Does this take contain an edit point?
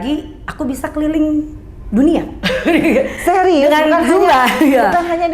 no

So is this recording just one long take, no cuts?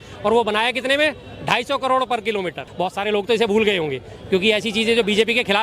no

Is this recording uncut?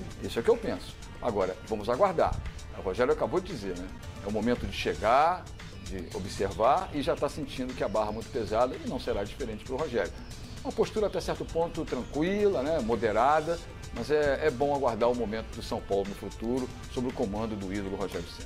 yes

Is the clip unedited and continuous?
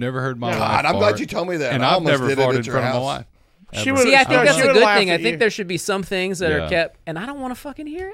yes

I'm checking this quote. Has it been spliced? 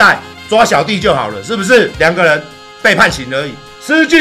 yes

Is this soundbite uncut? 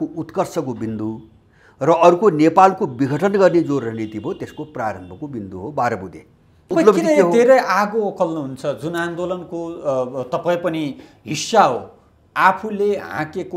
no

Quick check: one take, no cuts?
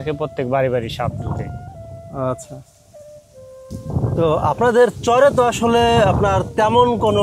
yes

